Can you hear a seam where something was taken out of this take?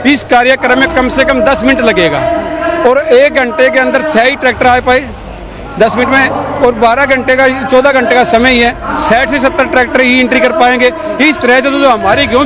no; 0 cuts

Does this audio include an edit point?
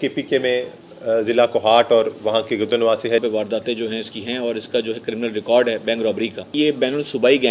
yes; 2 cuts; at 3.2 s, 6.5 s

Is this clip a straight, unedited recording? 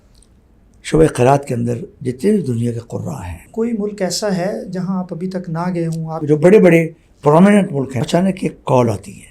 no; 3 cuts; at 3.5 s, 6.2 s, 8.0 s

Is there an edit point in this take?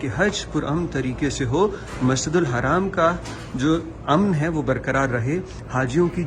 no; 0 cuts

